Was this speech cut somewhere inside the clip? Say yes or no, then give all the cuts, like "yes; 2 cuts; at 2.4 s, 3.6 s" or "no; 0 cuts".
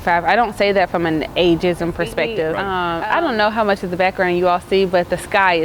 yes; 1 cut; at 2.6 s